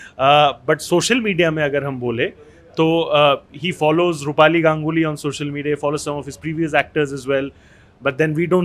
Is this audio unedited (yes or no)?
yes